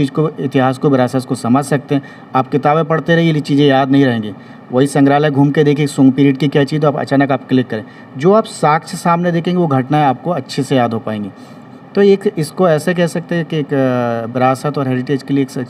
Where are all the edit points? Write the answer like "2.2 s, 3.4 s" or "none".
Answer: none